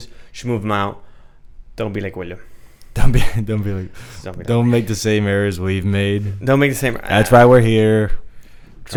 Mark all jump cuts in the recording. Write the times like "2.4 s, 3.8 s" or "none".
none